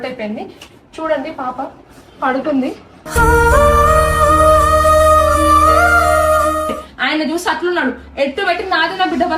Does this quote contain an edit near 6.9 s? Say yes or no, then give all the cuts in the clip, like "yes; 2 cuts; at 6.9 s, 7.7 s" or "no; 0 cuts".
yes; 1 cut; at 6.9 s